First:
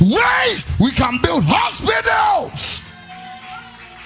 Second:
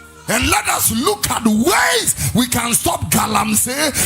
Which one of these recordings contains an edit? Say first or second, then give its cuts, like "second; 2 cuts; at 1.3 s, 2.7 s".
second; 1 cut; at 2.7 s